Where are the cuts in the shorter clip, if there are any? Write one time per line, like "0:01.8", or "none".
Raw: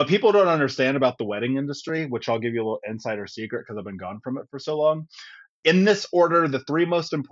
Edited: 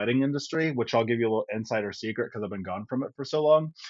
none